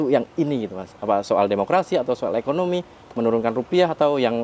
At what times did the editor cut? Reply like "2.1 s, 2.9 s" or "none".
none